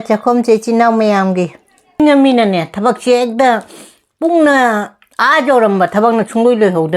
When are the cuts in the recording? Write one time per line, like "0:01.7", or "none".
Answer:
0:02.0